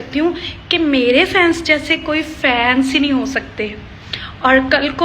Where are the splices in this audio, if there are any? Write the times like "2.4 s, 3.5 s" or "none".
none